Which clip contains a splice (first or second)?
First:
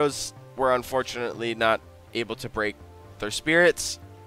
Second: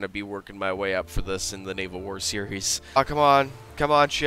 second